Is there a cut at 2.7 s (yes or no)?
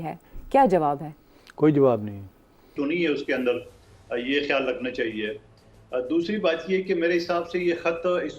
yes